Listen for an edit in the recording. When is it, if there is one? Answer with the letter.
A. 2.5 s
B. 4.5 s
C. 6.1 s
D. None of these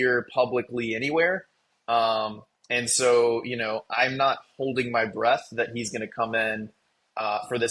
D